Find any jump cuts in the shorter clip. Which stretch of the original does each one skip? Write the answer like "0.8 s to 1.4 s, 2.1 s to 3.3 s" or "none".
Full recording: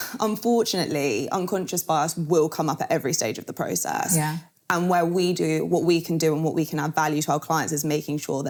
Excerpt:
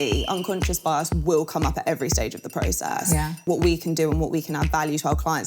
4.5 s to 5.7 s